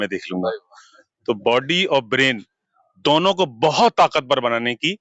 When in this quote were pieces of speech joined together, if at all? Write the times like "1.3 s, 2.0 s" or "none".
none